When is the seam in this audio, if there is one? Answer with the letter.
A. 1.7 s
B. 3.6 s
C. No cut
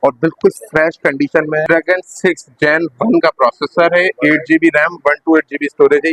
A